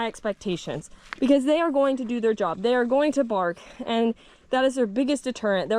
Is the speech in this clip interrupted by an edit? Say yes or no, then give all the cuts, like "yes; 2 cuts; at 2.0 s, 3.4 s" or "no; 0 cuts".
no; 0 cuts